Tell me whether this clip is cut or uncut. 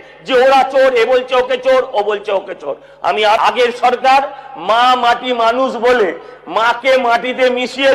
cut